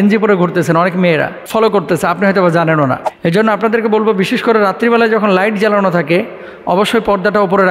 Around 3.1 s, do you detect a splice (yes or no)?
yes